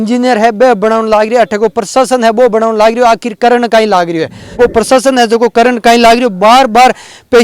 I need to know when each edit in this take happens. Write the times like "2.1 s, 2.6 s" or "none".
4.5 s